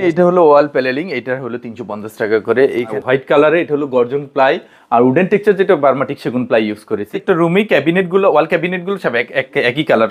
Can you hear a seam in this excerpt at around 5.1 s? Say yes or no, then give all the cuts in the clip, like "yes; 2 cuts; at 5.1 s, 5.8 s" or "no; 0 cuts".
no; 2 cuts; at 2.9 s, 7.0 s